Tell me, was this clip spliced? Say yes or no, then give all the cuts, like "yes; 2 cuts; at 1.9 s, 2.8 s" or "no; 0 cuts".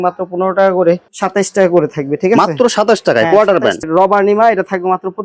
yes; 2 cuts; at 1.1 s, 3.8 s